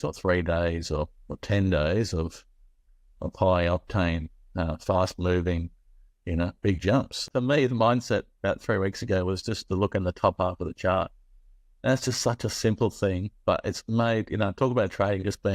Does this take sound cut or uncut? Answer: cut